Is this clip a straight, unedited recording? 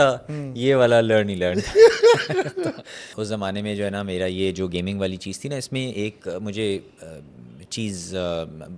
no; 1 cut; at 3.1 s

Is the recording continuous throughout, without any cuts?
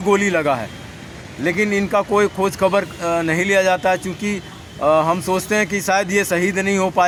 yes; 0 cuts

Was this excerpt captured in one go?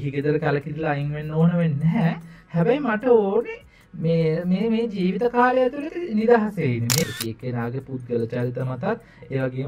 no; 1 cut; at 7.1 s

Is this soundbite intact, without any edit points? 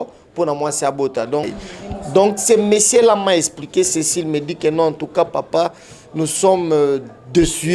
no; 1 cut; at 1.4 s

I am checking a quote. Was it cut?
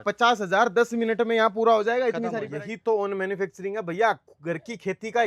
yes; 1 cut; at 2.4 s

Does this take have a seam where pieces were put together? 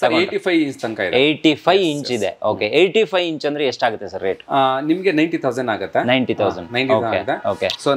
no; 0 cuts

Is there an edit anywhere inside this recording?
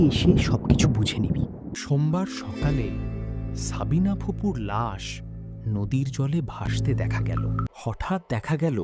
yes; 2 cuts; at 1.7 s, 7.8 s

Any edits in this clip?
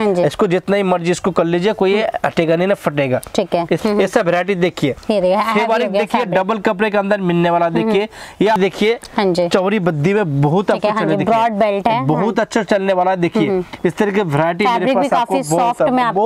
yes; 2 cuts; at 3.8 s, 8.6 s

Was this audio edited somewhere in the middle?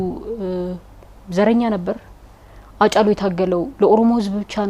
no; 0 cuts

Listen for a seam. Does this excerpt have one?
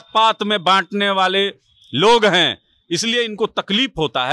no; 0 cuts

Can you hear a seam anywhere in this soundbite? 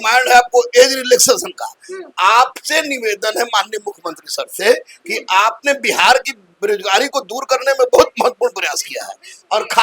no; 0 cuts

